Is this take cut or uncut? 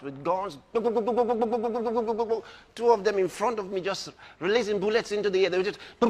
uncut